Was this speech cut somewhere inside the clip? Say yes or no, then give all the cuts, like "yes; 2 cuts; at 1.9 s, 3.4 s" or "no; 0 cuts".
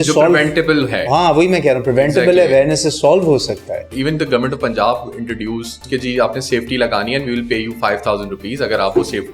yes; 2 cuts; at 3.9 s, 5.8 s